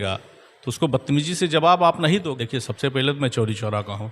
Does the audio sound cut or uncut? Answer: cut